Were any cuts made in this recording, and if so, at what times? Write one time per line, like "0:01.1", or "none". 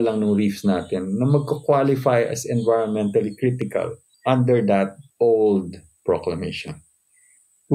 0:04.0
0:05.0